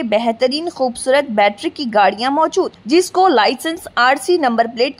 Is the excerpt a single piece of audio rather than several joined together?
yes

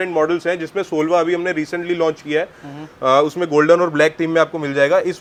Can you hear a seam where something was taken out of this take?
no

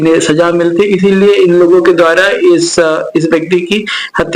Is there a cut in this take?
no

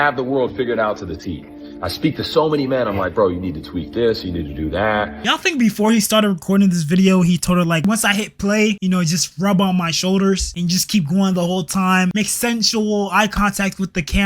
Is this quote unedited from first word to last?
no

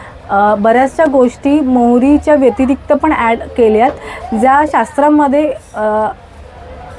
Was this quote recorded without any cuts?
yes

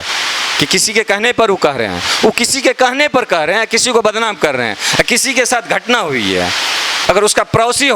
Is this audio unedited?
no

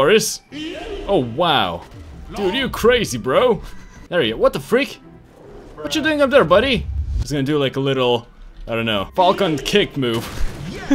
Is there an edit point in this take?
yes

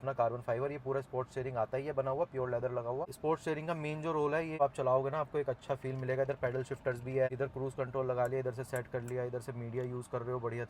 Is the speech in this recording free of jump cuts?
no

